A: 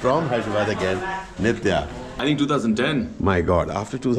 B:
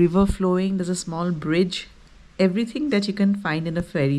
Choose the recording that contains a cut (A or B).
A